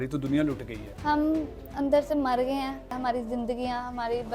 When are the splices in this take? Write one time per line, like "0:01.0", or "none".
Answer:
0:03.0